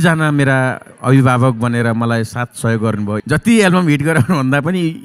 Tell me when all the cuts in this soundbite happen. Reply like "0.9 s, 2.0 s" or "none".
3.2 s